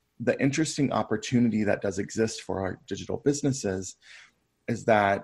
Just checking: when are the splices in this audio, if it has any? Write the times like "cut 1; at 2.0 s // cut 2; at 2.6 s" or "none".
none